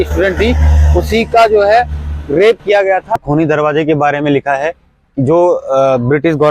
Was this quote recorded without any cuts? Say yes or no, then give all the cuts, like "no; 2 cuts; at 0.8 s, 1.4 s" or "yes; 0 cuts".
no; 1 cut; at 3.2 s